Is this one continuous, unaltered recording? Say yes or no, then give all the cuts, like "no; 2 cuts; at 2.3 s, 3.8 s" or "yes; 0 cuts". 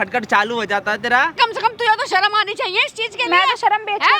no; 1 cut; at 1.3 s